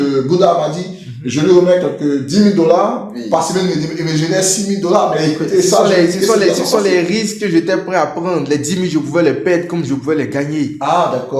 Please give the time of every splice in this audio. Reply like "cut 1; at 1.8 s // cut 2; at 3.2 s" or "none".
none